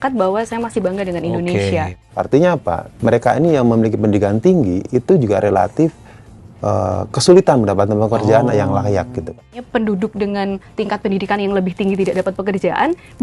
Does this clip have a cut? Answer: yes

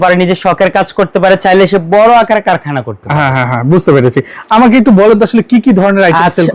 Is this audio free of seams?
yes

